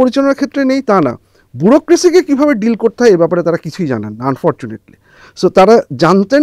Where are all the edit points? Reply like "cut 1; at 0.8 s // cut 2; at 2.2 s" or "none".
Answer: none